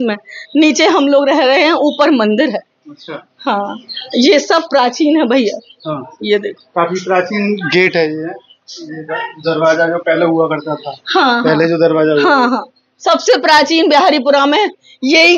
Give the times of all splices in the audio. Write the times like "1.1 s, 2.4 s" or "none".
none

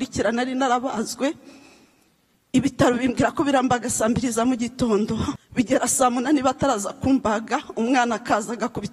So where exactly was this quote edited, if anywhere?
5.4 s

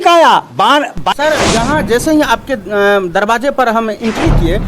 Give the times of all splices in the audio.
1.0 s

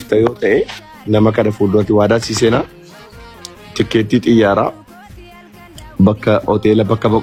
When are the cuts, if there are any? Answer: none

